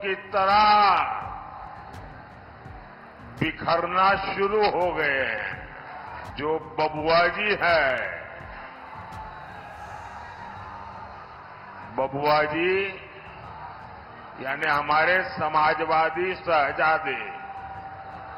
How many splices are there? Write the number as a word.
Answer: one